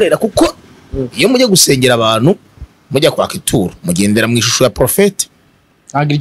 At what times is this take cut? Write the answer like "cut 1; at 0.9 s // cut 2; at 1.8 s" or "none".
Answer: none